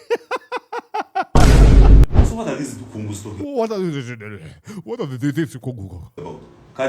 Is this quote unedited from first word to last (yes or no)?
no